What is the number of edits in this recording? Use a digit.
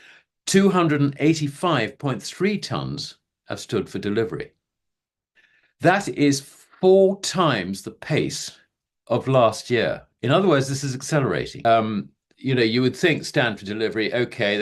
1